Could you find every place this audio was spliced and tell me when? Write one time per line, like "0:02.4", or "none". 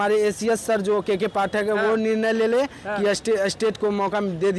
none